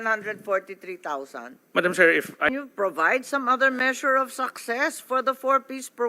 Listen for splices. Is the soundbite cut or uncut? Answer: cut